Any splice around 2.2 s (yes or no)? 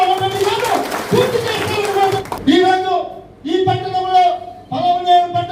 yes